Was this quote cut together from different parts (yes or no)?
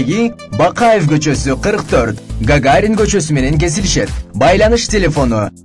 no